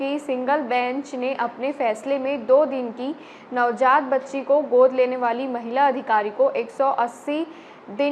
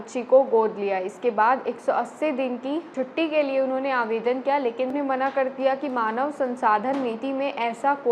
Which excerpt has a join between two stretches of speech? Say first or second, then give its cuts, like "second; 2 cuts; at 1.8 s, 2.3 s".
second; 2 cuts; at 2.9 s, 4.9 s